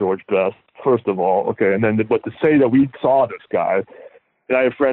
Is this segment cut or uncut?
uncut